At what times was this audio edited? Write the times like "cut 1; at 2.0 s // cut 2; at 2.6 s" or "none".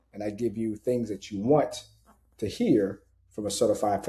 none